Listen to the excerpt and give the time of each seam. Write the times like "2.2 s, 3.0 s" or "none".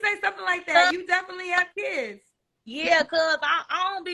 2.2 s